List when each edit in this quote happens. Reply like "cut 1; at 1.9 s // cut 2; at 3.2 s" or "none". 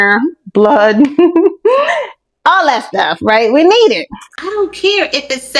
cut 1; at 4.2 s